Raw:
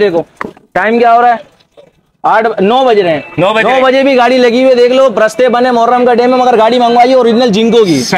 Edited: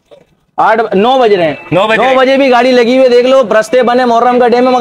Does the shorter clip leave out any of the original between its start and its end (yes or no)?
no